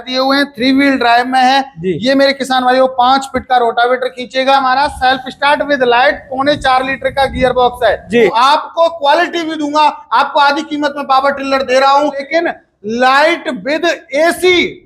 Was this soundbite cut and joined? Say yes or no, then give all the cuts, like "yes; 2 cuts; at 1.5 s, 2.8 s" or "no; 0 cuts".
yes; 3 cuts; at 4.6 s, 8.3 s, 12.3 s